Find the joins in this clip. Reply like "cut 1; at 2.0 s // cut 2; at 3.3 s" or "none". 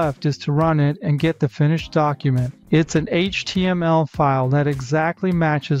cut 1; at 2.5 s